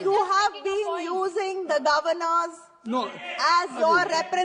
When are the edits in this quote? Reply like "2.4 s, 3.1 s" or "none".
none